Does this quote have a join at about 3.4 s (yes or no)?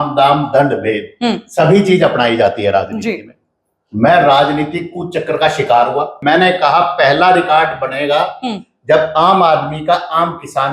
no